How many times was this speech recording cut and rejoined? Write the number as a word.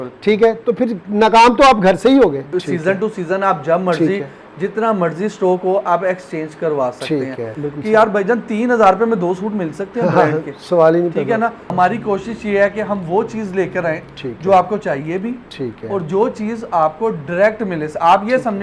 three